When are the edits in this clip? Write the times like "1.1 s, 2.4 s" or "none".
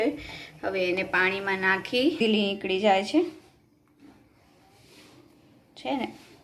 2.2 s